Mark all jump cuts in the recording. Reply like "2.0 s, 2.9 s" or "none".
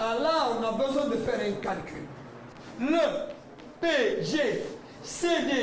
none